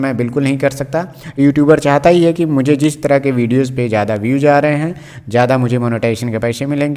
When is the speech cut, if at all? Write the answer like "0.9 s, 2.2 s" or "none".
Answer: 1.2 s